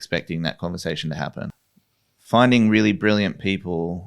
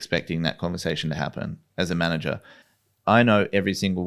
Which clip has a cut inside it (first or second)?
first